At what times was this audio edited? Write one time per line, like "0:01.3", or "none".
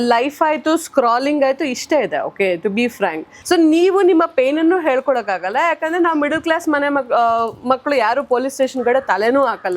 0:03.3